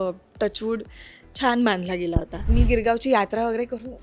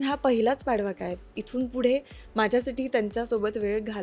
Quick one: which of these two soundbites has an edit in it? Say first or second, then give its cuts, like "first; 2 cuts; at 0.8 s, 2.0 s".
first; 1 cut; at 2.5 s